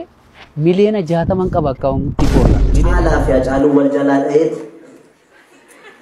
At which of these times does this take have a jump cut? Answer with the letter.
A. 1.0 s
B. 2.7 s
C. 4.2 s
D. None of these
B